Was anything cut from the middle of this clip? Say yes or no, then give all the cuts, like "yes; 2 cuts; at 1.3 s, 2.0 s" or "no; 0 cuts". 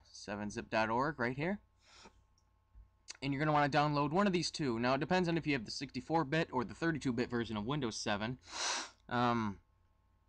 yes; 1 cut; at 8.2 s